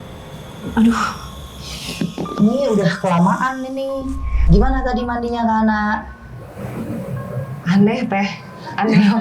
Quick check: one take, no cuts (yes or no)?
no